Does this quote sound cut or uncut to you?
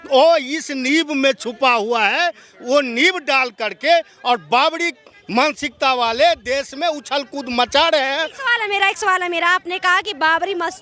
uncut